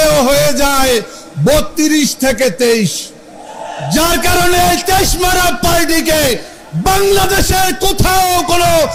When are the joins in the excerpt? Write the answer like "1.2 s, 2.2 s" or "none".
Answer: none